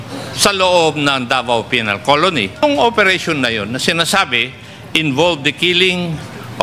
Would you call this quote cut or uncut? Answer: cut